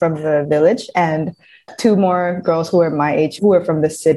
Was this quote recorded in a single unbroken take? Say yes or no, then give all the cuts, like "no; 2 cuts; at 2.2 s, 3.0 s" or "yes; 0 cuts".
no; 2 cuts; at 1.5 s, 3.4 s